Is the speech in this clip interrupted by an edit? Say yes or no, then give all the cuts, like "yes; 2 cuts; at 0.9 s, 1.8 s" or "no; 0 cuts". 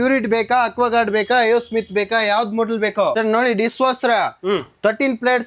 yes; 1 cut; at 3.1 s